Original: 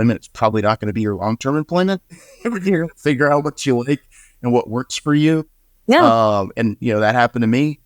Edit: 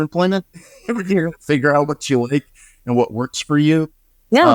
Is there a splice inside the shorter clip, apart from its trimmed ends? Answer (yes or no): no